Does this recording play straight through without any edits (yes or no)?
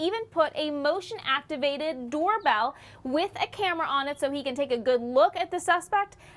yes